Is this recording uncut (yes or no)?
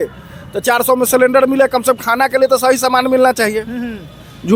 yes